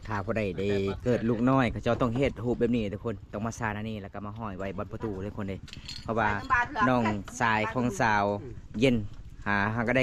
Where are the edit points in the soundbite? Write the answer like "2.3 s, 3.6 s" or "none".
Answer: none

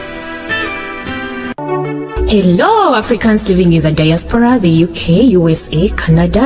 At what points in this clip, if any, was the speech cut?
1.6 s

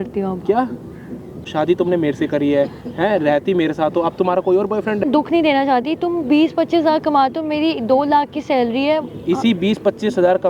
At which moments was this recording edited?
1.5 s, 5.0 s

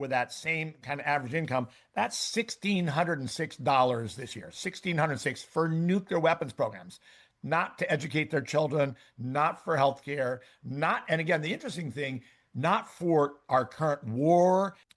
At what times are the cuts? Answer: none

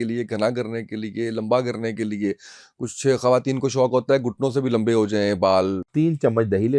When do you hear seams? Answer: 5.9 s

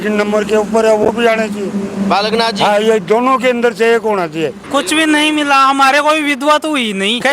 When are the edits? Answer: 4.6 s

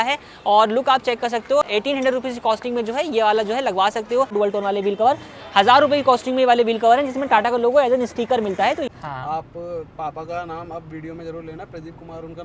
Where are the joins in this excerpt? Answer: 4.3 s, 8.9 s

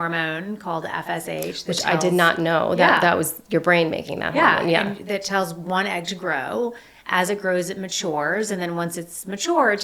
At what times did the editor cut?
none

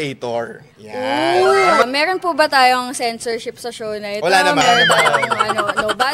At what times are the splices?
1.8 s

